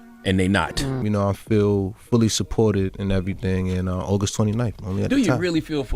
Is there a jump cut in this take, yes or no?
yes